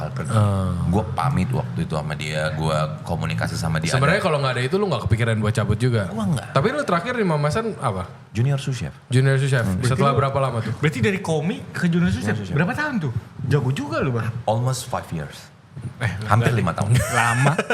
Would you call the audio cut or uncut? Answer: uncut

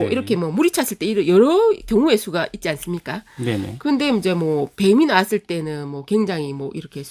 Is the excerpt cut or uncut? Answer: uncut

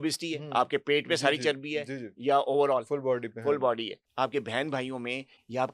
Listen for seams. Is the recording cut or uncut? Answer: cut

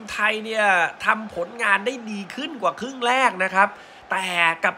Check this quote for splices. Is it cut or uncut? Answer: uncut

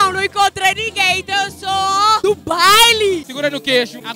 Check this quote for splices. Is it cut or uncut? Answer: cut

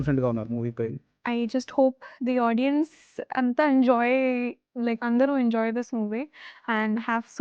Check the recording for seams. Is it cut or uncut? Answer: cut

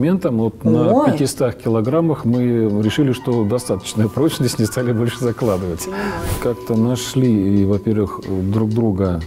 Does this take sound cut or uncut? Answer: cut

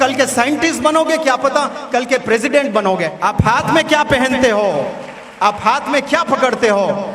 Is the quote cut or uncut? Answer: cut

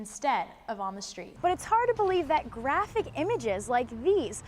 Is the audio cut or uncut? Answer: cut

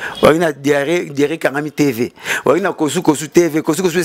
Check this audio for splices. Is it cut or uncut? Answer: uncut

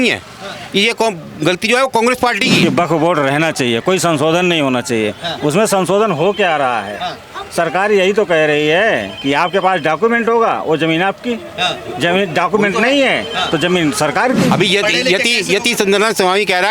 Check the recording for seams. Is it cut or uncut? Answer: cut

